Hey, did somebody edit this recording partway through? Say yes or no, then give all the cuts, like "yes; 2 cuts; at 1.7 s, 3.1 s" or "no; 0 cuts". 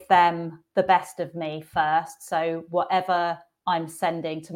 no; 0 cuts